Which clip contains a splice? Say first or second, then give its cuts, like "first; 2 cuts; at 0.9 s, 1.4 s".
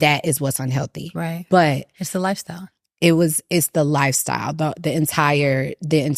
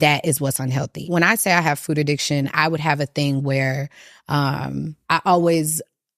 second; 2 cuts; at 1.0 s, 5.0 s